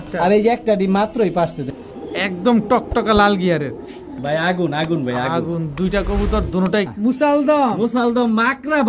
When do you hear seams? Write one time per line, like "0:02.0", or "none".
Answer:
0:01.7
0:06.9